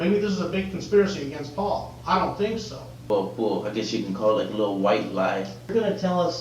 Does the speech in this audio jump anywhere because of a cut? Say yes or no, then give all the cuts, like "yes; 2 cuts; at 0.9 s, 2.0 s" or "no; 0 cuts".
yes; 2 cuts; at 3.0 s, 5.7 s